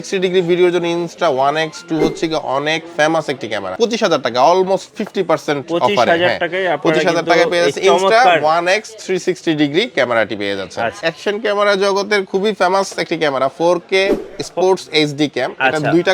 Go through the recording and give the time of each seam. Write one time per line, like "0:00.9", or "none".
0:03.7
0:10.9